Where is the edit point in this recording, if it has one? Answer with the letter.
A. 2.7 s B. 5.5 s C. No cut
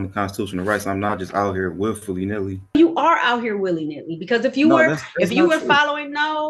A